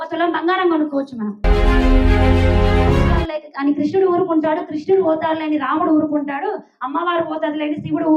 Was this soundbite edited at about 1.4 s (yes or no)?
no